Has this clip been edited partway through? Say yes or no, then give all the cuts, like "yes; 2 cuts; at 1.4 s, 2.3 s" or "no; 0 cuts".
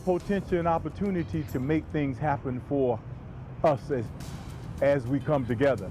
no; 0 cuts